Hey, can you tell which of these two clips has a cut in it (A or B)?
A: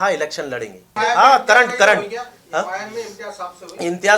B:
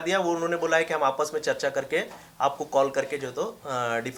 A